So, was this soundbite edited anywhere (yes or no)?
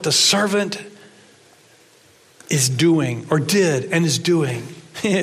no